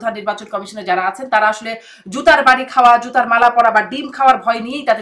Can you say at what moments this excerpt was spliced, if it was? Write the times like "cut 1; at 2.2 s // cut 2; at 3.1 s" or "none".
none